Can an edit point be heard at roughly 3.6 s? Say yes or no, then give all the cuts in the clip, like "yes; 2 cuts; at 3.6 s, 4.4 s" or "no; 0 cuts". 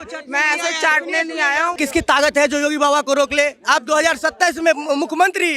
no; 1 cut; at 1.8 s